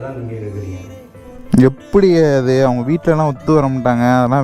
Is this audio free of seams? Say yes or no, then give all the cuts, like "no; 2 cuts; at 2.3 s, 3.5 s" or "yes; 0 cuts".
no; 1 cut; at 1.4 s